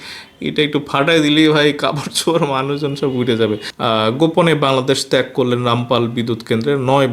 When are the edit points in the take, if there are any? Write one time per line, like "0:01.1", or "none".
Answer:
0:03.7